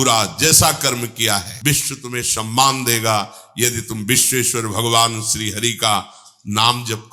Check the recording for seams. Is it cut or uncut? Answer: cut